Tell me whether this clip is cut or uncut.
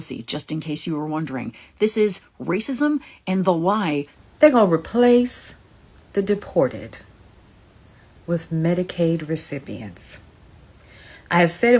cut